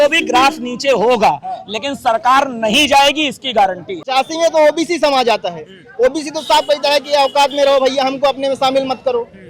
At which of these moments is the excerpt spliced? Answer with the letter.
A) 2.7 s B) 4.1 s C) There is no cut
B